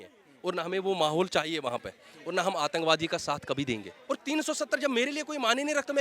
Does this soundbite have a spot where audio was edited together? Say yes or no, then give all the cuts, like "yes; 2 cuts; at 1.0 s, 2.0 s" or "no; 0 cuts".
yes; 1 cut; at 3.9 s